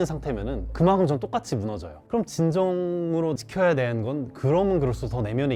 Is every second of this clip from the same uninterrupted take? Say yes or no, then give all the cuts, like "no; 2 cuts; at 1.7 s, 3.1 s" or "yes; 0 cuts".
yes; 0 cuts